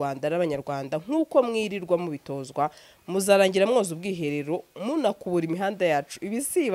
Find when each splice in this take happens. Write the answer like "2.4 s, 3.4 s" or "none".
none

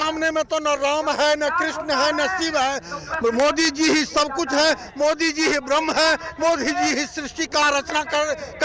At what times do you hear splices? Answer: none

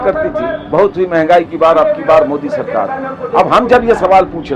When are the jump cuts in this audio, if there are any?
none

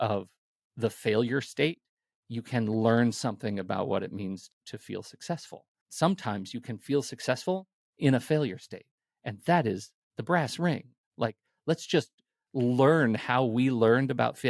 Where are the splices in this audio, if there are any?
4.5 s, 5.8 s

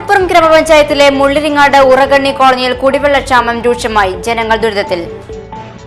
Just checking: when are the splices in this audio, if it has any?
none

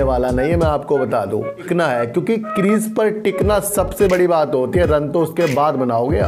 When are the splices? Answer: 1.7 s

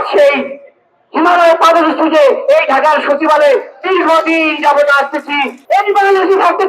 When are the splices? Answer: 5.5 s

